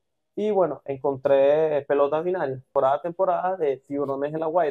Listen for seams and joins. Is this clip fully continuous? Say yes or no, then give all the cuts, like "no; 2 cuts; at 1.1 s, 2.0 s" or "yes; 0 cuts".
no; 1 cut; at 2.7 s